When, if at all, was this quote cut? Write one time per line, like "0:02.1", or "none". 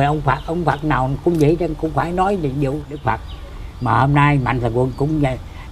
0:02.9